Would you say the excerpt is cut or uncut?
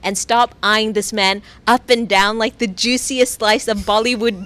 uncut